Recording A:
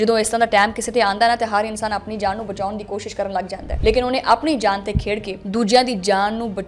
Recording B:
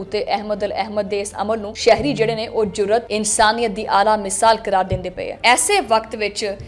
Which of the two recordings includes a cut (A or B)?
B